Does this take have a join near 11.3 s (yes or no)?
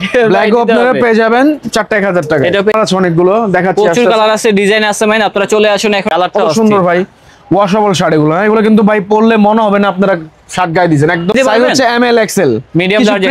yes